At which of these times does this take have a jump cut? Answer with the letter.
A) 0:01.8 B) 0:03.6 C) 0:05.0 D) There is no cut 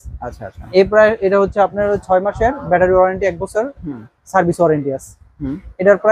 D